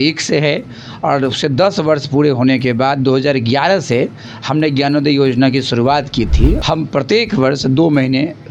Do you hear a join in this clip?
yes; 1 cut; at 6.6 s

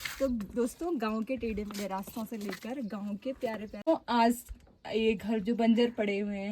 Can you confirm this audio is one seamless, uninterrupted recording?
no; 1 cut; at 3.8 s

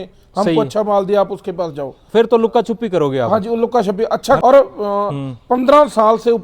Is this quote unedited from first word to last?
no; 1 cut; at 4.4 s

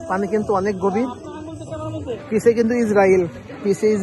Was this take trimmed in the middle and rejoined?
yes; 1 cut; at 2.2 s

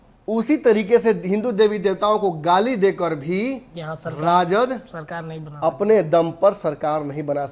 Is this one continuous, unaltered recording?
yes; 0 cuts

